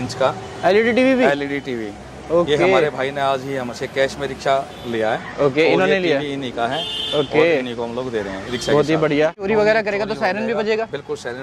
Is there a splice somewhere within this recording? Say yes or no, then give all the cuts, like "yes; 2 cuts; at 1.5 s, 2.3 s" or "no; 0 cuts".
yes; 1 cut; at 9.5 s